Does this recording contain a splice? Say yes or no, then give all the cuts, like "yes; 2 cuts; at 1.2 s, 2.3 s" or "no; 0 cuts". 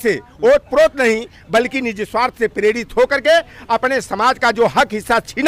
no; 0 cuts